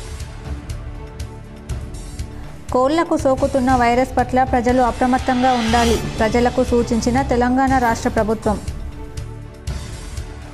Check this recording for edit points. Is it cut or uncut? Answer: cut